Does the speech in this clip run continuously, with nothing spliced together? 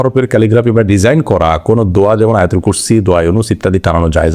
yes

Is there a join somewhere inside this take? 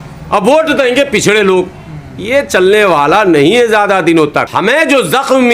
yes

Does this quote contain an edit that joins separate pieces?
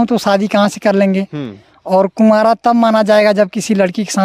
no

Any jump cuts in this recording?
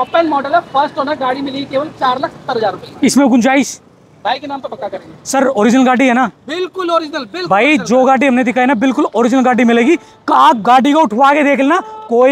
no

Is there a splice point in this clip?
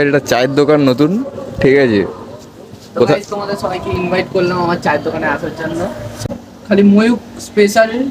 yes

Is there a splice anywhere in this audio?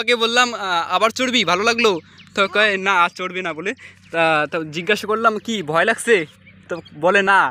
no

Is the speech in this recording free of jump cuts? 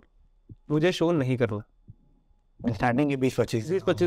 yes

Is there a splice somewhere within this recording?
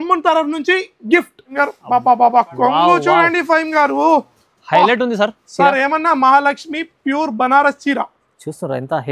yes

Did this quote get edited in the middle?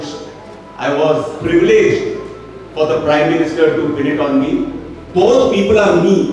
yes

